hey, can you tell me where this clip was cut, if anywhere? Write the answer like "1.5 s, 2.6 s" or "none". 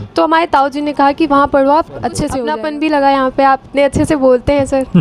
2.3 s